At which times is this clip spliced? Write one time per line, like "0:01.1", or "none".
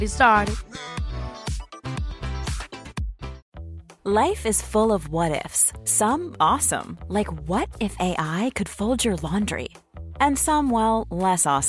0:03.3